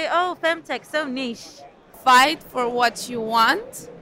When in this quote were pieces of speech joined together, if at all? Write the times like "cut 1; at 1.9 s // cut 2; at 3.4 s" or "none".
cut 1; at 1.9 s